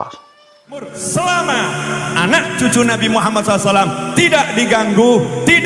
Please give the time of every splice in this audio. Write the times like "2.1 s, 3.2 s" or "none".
0.9 s